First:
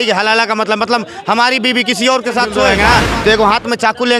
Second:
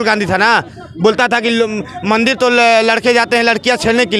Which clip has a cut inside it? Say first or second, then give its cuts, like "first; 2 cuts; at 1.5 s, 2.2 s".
first; 1 cut; at 2.7 s